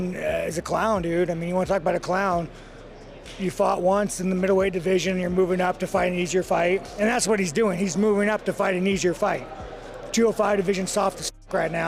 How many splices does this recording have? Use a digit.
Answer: 0